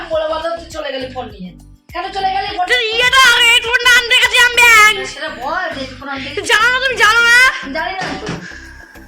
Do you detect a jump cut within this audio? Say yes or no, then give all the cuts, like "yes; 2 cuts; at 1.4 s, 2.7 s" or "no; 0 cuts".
no; 0 cuts